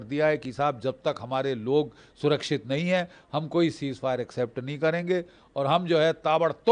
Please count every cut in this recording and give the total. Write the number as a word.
zero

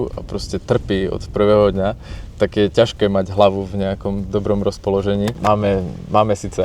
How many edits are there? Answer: one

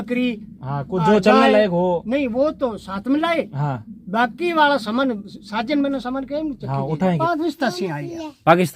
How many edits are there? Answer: one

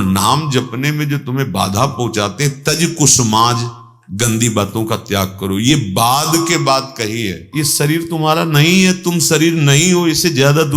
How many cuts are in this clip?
one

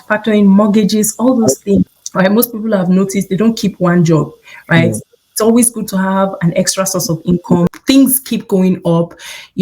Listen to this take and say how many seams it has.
two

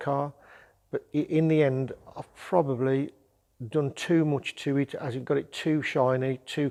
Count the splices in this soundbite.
zero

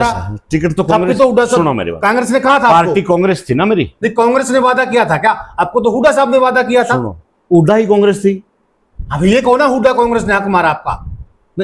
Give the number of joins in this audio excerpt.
zero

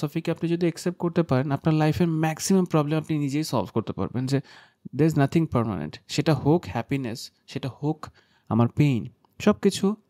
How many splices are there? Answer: zero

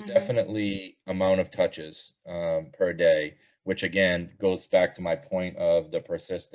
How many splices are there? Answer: zero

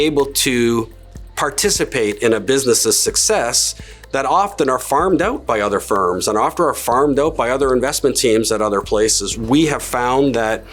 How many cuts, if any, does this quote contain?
one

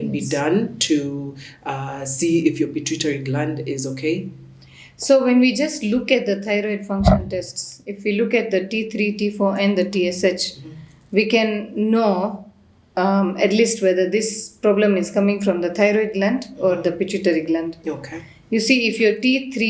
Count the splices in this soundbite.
zero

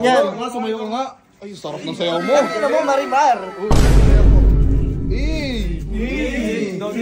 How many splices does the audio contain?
zero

